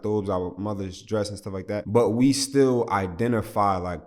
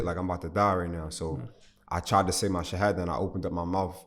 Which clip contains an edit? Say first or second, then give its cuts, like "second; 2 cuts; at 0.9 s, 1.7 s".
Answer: first; 1 cut; at 1.9 s